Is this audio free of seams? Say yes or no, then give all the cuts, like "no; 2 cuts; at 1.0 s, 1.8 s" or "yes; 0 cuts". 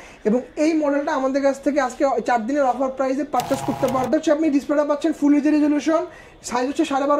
no; 1 cut; at 4.1 s